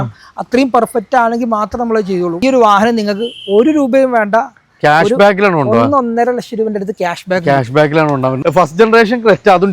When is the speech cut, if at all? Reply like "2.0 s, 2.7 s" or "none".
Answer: 2.4 s, 8.4 s